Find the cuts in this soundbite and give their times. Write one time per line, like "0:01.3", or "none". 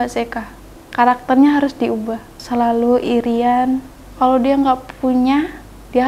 none